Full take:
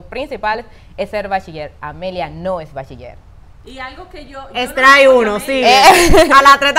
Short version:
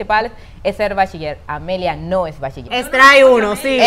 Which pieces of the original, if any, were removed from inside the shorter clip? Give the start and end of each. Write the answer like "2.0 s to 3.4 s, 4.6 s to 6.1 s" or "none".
2.9 s to 4.4 s